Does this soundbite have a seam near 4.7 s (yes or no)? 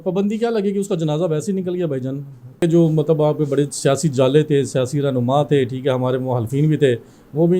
no